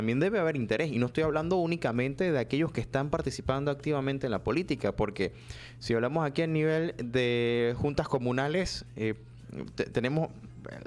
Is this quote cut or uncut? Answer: uncut